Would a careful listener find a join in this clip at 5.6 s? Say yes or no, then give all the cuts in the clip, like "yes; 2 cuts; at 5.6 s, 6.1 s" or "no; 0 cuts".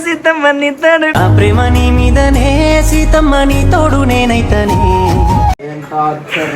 yes; 2 cuts; at 1.1 s, 5.6 s